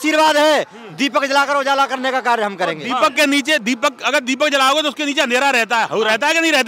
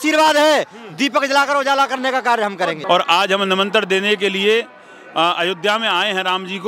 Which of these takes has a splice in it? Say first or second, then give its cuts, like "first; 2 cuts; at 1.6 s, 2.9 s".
second; 1 cut; at 2.8 s